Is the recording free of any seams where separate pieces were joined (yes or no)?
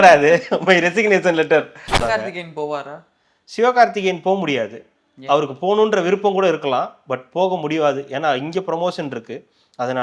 no